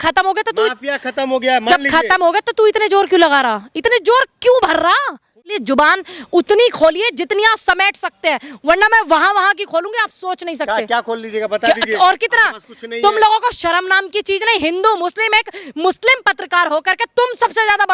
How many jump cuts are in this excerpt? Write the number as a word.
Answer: one